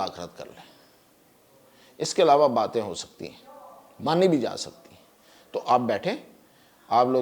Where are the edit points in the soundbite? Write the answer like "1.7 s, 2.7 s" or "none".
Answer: none